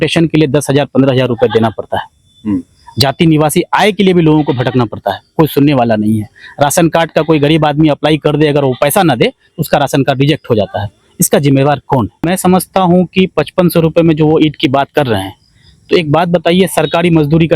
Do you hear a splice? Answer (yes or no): yes